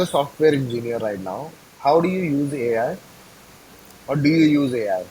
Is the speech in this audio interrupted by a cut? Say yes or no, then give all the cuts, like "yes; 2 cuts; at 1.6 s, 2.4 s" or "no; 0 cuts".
no; 0 cuts